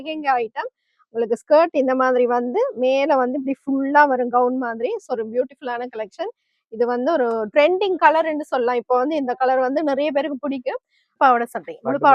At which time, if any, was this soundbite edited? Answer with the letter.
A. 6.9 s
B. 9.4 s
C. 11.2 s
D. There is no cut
C